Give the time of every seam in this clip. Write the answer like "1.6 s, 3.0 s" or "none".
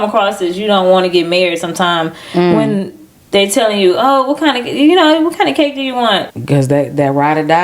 6.3 s

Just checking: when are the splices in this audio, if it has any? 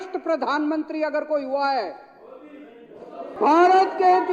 3.3 s

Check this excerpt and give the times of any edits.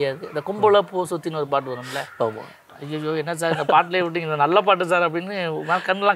2.6 s

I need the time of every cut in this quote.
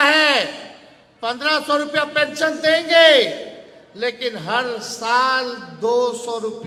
none

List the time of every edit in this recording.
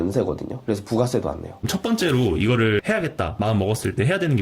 1.5 s, 2.8 s

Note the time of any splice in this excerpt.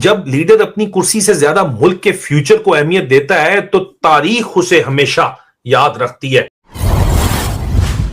6.6 s

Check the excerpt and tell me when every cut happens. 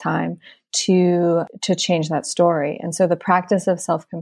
1.5 s

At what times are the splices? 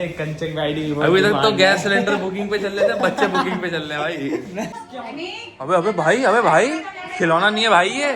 4.7 s

